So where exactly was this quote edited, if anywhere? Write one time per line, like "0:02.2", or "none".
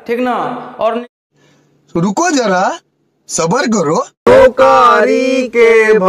0:01.0
0:04.1